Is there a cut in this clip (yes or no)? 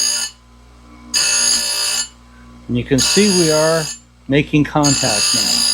no